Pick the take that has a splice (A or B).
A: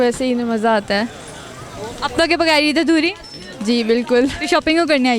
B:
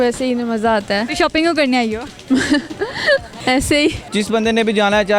B